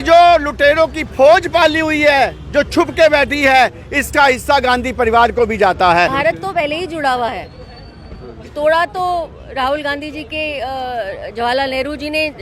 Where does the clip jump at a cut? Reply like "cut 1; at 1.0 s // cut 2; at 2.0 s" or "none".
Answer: cut 1; at 6.1 s